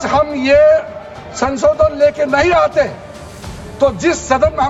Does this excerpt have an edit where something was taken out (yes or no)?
no